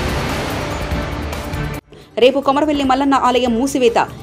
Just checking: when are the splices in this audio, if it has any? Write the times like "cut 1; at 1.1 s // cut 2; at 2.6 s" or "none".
cut 1; at 1.7 s